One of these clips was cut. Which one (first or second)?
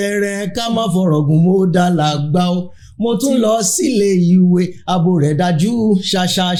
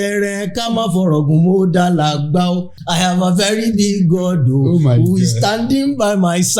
second